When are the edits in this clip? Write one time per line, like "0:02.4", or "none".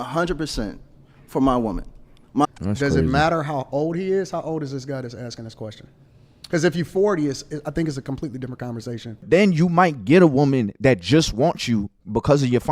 0:02.4
0:09.2